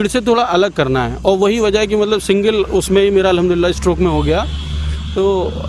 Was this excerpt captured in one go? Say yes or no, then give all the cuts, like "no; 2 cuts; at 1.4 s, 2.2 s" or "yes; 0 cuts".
yes; 0 cuts